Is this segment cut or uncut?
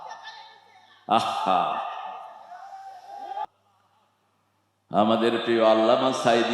cut